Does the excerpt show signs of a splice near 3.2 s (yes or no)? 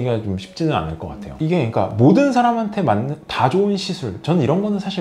no